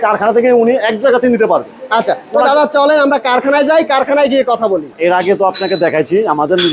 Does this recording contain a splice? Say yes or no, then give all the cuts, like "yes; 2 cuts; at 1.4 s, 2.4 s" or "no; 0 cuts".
no; 0 cuts